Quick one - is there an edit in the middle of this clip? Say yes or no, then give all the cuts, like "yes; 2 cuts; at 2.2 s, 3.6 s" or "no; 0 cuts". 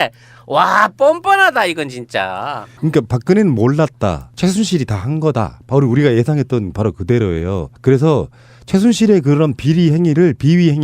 yes; 1 cut; at 6.3 s